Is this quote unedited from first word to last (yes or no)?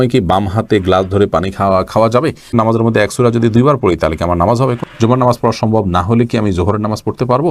no